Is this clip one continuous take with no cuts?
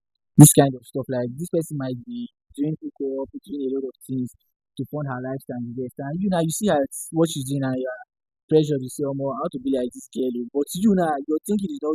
yes; 0 cuts

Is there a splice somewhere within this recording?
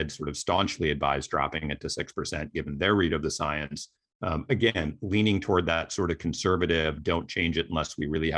no; 0 cuts

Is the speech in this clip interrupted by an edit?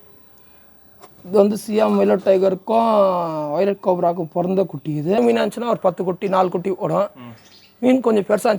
yes; 1 cut; at 5.2 s

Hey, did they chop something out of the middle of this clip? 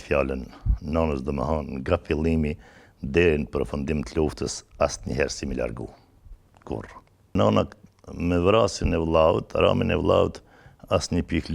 yes; 1 cut; at 7.3 s

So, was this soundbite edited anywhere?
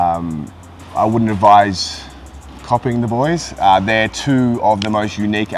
no; 0 cuts

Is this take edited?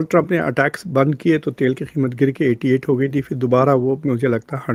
no; 0 cuts

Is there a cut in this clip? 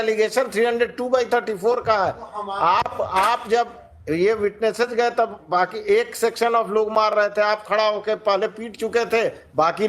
no; 0 cuts

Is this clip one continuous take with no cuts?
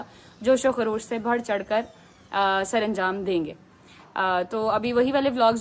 yes; 0 cuts

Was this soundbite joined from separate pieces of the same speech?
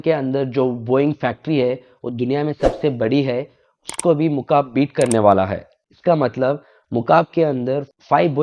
no; 0 cuts

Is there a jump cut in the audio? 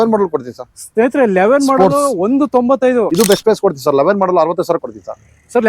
yes; 1 cut; at 3.1 s

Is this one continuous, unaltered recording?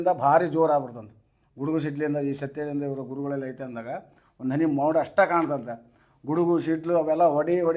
yes; 0 cuts

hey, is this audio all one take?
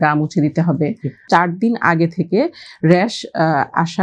no; 1 cut; at 1.2 s

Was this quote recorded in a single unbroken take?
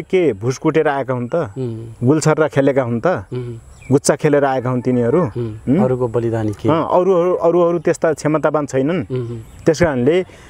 yes; 0 cuts

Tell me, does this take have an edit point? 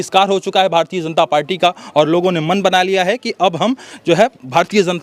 no; 0 cuts

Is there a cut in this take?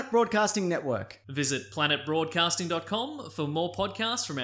no; 0 cuts

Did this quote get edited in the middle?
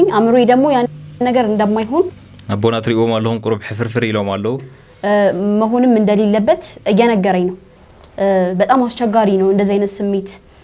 no; 0 cuts

